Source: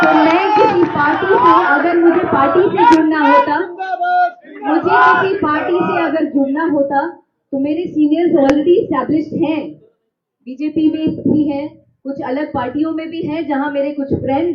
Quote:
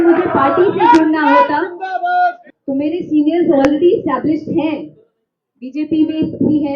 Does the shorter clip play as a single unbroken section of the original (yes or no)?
no